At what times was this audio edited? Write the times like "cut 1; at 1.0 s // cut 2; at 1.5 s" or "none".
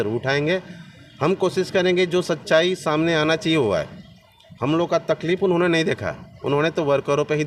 none